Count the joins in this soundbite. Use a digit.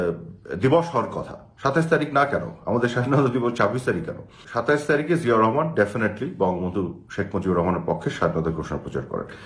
1